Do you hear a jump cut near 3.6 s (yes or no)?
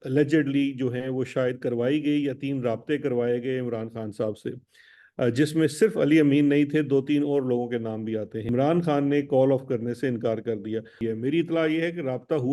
no